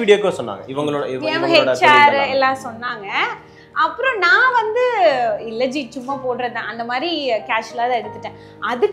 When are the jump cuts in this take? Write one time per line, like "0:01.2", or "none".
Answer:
none